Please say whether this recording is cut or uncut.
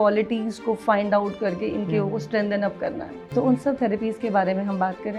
cut